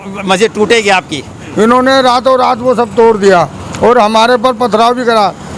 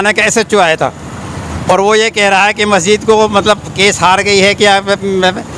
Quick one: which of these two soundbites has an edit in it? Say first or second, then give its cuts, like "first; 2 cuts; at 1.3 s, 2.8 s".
first; 1 cut; at 1.4 s